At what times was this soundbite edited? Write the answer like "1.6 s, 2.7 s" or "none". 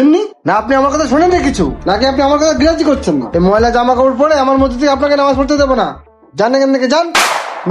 none